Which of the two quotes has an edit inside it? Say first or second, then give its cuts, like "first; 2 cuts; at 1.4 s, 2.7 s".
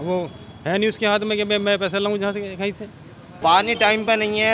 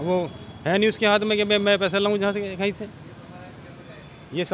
first; 1 cut; at 3.4 s